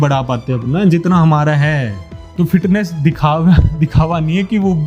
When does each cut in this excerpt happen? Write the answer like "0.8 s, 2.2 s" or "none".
2.2 s

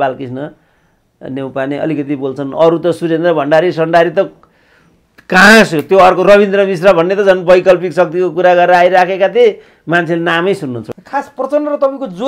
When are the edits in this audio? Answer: 10.9 s

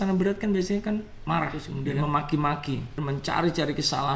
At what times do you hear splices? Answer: 1.7 s, 3.0 s

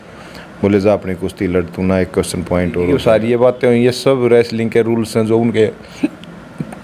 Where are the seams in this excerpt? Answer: 2.9 s

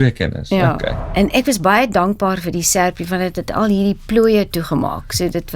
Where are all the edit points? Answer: 0.9 s

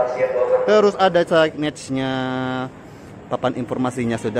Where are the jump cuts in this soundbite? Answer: none

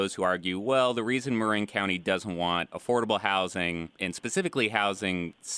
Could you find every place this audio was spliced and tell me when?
4.0 s

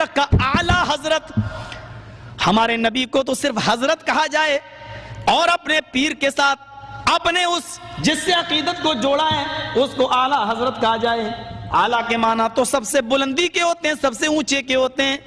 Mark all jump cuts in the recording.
11.6 s

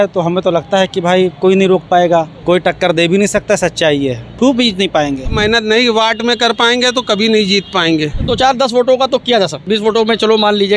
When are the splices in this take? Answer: 2.3 s, 4.2 s, 5.3 s, 8.3 s, 9.6 s

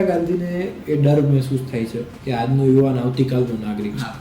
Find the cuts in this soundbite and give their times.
2.1 s

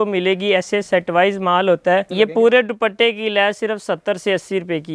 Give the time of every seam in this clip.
2.1 s

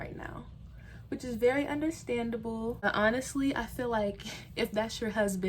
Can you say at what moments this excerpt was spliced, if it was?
2.8 s

